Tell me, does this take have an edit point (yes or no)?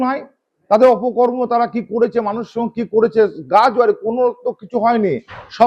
no